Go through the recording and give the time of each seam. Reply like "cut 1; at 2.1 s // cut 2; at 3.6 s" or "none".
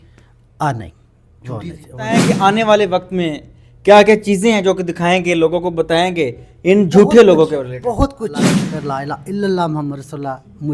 cut 1; at 2.2 s // cut 2; at 8.4 s